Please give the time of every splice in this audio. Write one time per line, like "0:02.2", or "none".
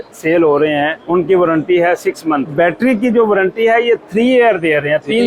0:01.0
0:02.5

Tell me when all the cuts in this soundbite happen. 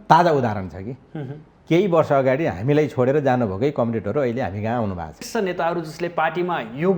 0:05.2

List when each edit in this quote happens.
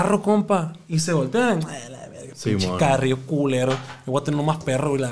none

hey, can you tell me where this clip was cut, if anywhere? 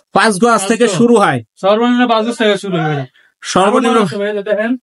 none

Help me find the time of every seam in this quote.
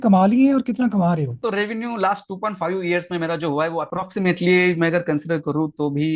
0:01.3
0:03.9

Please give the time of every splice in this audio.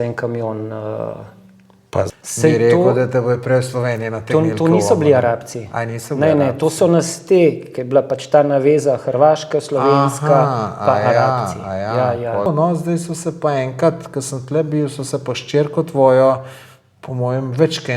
0:02.1
0:12.5

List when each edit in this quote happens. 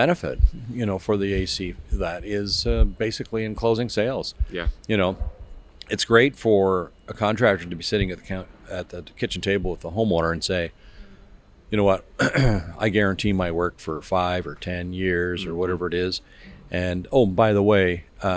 none

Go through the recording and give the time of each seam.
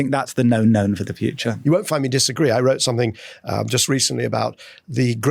0:01.6

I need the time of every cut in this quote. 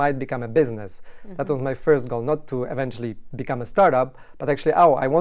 none

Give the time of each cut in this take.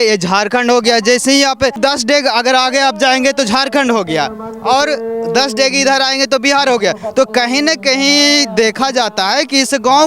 0:01.8

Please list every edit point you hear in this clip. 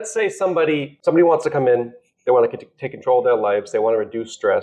0:00.9

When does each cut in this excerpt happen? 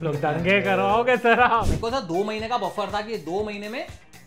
0:01.6

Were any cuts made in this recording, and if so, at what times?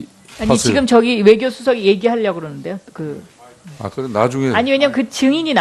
0:02.5

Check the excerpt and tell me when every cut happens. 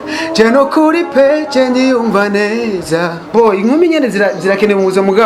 0:03.3

